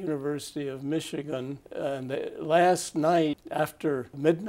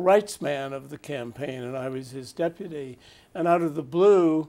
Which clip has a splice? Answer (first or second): first